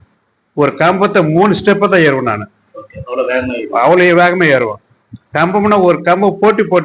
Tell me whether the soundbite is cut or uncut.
uncut